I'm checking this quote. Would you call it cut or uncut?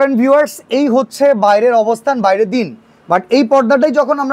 uncut